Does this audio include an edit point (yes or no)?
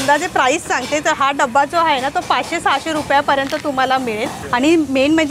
yes